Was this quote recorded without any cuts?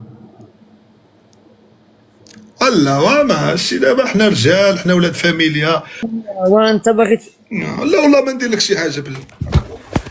no; 1 cut; at 5.9 s

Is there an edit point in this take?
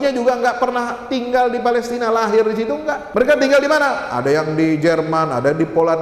yes; 1 cut; at 3.0 s

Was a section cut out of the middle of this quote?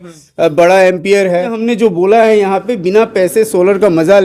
yes; 1 cut; at 1.6 s

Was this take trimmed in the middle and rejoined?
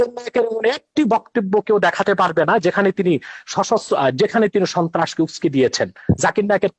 no; 0 cuts

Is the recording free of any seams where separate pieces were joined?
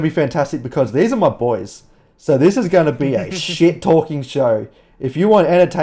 yes; 0 cuts

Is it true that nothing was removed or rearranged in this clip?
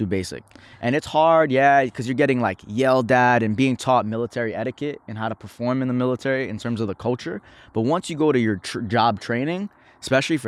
yes; 0 cuts

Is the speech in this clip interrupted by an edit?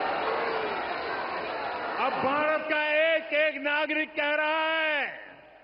no; 0 cuts

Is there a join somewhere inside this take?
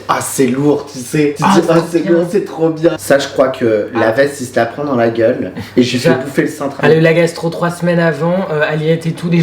yes; 2 cuts; at 3.0 s, 6.8 s

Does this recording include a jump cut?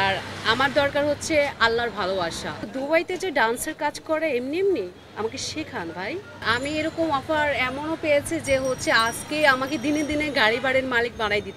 yes; 2 cuts; at 2.6 s, 6.4 s

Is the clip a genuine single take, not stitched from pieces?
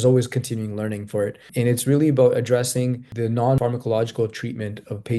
no; 2 cuts; at 1.5 s, 3.4 s

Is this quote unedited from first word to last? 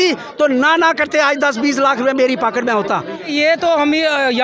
no; 1 cut; at 3.3 s

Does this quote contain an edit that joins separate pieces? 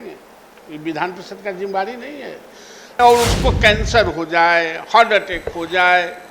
yes; 1 cut; at 2.8 s

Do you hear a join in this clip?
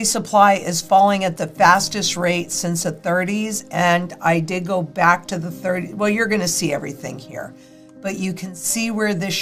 no; 0 cuts

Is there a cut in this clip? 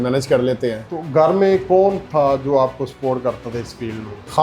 yes; 1 cut; at 0.9 s

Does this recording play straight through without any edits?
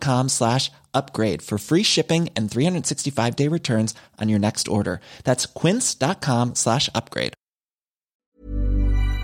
no; 1 cut; at 8.2 s

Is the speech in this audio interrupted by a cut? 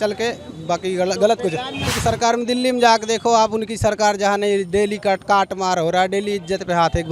yes; 1 cut; at 1.8 s

